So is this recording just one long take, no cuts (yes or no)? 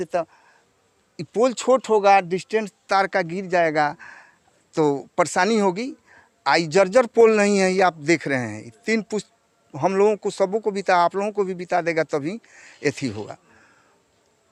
yes